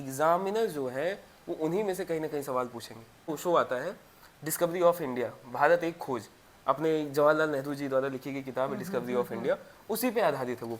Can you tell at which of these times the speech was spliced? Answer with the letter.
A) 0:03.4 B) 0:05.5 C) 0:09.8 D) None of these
A